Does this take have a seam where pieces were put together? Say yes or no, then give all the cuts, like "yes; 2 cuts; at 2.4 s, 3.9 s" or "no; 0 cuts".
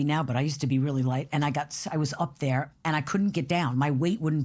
no; 0 cuts